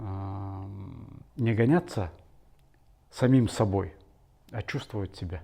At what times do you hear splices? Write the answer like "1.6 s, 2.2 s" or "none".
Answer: none